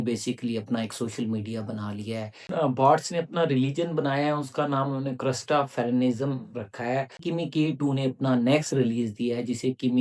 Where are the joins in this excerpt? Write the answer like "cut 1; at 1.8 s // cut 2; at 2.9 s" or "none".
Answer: cut 1; at 2.4 s // cut 2; at 7.2 s